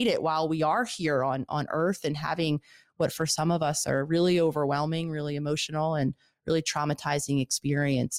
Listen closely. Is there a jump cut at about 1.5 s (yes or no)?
no